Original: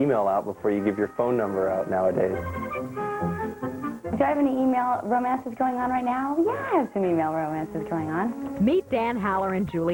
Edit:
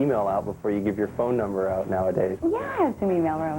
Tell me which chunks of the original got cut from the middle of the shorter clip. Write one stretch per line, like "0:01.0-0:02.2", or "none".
0:02.4-0:06.3